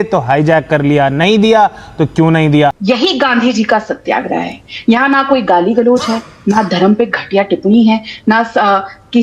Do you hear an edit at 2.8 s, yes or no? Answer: yes